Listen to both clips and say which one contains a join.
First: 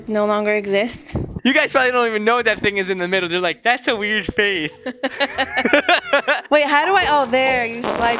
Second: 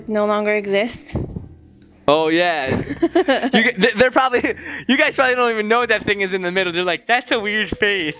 first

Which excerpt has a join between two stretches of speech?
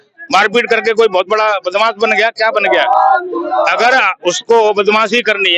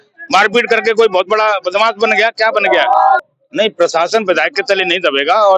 second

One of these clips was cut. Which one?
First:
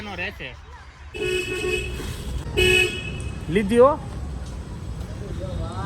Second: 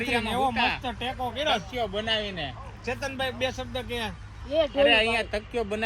first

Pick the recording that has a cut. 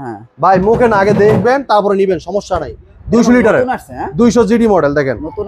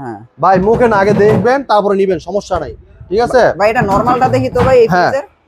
first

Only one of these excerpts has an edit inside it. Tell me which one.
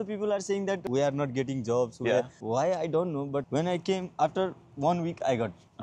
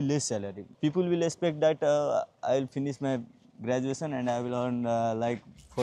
first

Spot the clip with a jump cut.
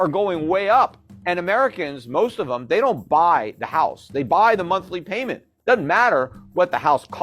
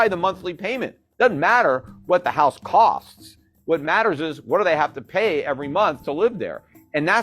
first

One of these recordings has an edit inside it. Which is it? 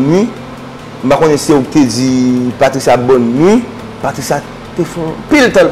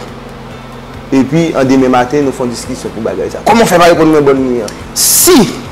second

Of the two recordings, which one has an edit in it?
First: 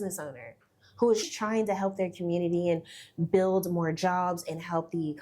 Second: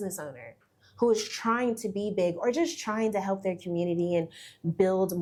first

